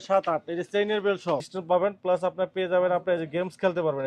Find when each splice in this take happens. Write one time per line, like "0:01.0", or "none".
0:01.5